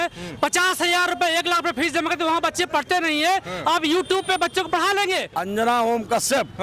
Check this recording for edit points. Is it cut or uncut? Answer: cut